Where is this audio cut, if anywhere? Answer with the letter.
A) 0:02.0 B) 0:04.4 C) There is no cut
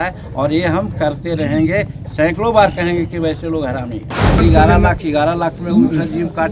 B